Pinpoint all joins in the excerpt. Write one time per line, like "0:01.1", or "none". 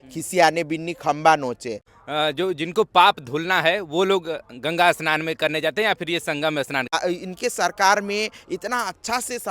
0:01.9
0:06.9